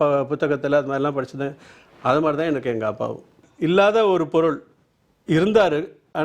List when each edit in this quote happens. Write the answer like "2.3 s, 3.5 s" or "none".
3.4 s